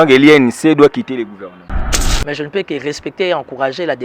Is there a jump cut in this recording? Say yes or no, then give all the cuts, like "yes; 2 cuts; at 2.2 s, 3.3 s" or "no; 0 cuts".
yes; 1 cut; at 2.0 s